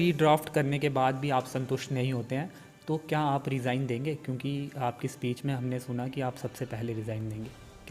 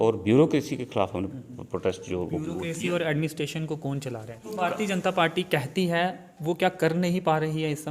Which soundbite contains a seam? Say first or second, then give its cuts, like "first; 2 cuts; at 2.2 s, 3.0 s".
second; 1 cut; at 4.5 s